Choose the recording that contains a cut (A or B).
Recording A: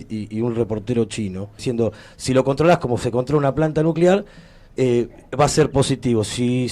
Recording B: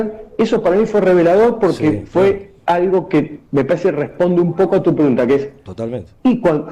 A